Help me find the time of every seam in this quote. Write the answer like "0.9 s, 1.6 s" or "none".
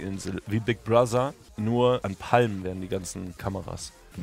1.5 s, 2.1 s, 3.4 s